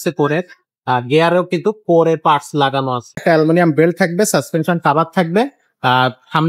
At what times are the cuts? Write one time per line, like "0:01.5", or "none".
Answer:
0:03.2